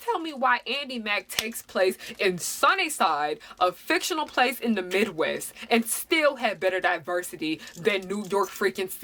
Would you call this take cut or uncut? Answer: uncut